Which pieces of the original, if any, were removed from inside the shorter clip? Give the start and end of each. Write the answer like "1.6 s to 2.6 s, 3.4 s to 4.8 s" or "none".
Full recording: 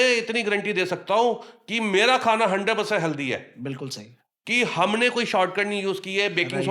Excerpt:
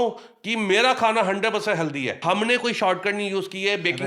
3.4 s to 4.7 s